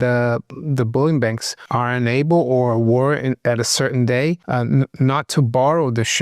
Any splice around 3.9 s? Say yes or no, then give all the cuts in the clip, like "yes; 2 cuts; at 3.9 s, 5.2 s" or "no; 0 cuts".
no; 1 cut; at 1.5 s